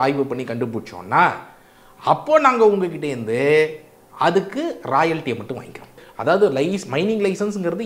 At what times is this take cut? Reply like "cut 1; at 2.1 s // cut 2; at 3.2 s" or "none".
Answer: cut 1; at 6.0 s

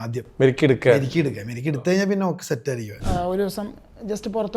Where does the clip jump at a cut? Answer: cut 1; at 2.9 s

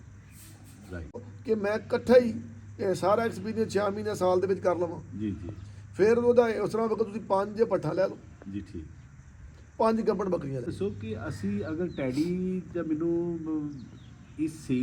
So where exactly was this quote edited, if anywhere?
cut 1; at 1.3 s // cut 2; at 10.7 s

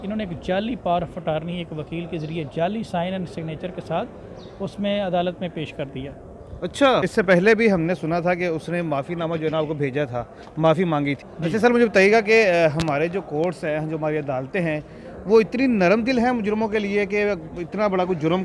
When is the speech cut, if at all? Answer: cut 1; at 7.1 s // cut 2; at 11.3 s

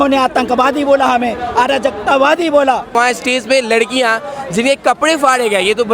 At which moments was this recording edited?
cut 1; at 3.0 s

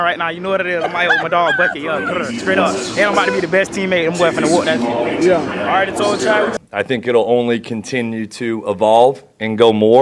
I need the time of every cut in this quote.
cut 1; at 6.6 s

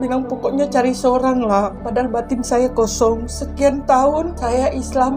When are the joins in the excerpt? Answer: none

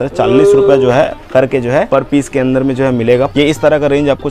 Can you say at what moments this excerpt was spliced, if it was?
cut 1; at 1.9 s // cut 2; at 3.3 s

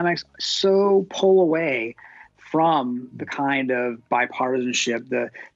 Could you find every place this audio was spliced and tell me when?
none

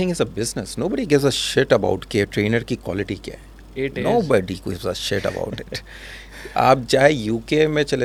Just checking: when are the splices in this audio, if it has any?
none

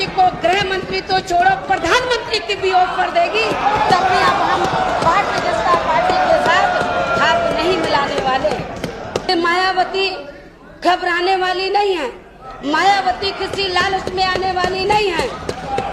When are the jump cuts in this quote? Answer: cut 1; at 9.3 s

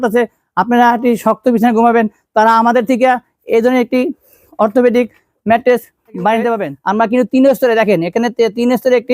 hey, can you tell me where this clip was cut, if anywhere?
cut 1; at 6.7 s

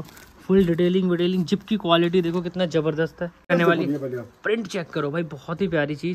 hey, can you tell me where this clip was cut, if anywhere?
cut 1; at 3.5 s

